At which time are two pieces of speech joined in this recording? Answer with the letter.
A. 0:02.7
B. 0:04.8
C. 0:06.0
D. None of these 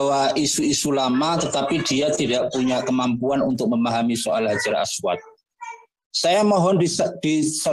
C